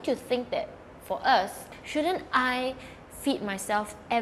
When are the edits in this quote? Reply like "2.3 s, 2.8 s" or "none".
1.7 s